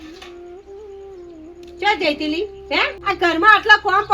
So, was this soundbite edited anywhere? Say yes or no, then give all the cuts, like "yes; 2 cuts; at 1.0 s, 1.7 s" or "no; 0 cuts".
yes; 1 cut; at 3.0 s